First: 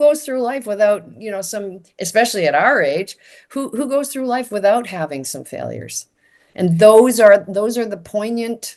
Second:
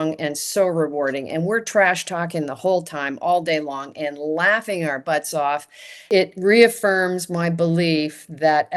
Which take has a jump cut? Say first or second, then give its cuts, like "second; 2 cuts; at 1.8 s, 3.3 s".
second; 1 cut; at 6.1 s